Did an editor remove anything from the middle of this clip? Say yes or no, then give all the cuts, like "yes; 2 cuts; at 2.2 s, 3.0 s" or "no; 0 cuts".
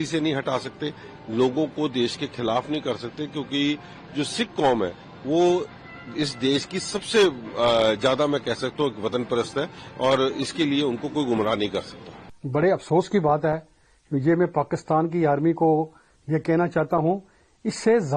no; 0 cuts